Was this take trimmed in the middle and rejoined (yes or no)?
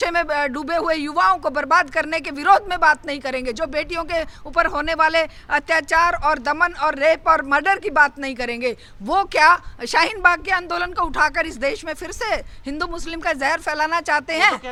no